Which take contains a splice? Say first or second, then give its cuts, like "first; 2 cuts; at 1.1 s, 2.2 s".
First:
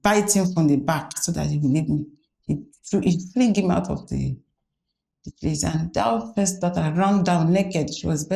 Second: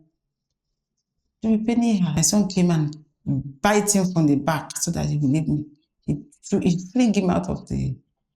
second; 1 cut; at 2.1 s